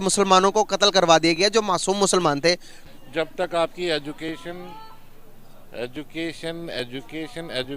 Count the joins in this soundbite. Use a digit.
1